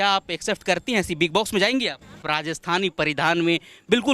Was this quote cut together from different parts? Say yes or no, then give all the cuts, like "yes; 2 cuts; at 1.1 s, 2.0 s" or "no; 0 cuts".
yes; 1 cut; at 2.2 s